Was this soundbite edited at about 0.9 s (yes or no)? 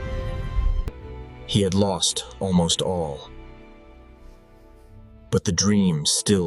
yes